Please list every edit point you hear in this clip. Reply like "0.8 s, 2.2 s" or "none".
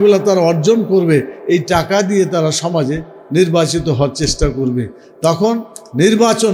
none